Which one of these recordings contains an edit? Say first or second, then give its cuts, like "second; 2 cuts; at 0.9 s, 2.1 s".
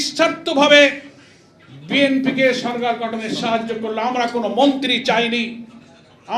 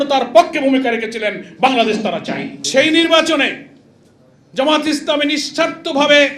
second; 1 cut; at 2.5 s